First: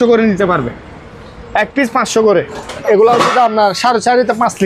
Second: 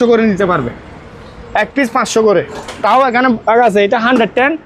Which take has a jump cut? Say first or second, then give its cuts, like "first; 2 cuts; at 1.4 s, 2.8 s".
first; 1 cut; at 2.8 s